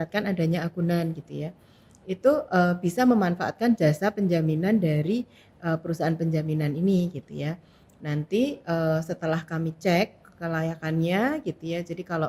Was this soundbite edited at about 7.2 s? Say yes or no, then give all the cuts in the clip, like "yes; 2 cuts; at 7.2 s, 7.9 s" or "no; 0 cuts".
no; 0 cuts